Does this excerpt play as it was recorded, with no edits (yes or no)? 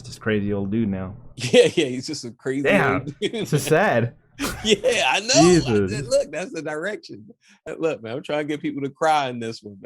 no